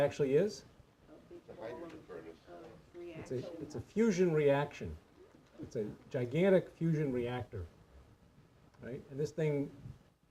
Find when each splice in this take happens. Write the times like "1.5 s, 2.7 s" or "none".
none